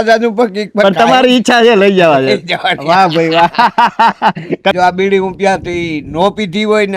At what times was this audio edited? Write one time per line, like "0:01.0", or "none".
0:04.7